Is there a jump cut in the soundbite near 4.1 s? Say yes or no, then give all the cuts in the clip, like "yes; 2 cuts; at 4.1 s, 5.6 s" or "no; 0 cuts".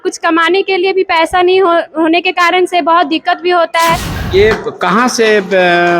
yes; 1 cut; at 4.1 s